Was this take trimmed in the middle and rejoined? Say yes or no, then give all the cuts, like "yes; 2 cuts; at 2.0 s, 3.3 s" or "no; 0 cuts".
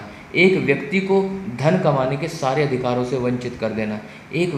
no; 0 cuts